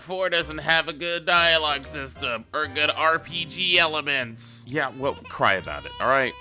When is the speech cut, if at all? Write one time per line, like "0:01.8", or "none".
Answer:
none

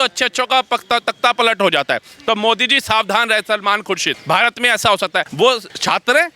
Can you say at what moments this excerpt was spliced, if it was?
0:04.1
0:05.4

